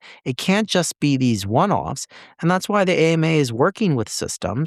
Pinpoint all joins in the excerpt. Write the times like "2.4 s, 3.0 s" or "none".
none

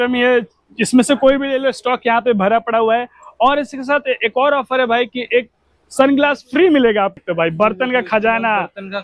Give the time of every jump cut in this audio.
7.2 s

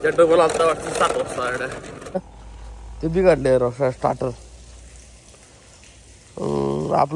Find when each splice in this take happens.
2.2 s

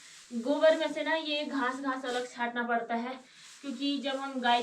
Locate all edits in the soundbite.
none

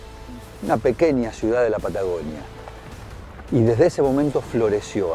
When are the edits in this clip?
none

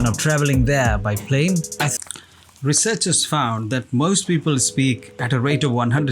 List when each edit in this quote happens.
1.9 s

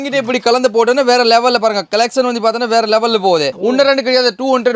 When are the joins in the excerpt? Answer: 3.5 s

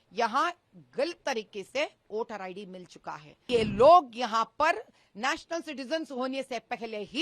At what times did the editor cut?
3.5 s

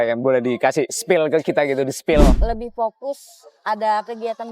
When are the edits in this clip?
2.4 s

